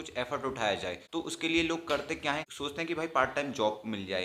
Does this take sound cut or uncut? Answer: uncut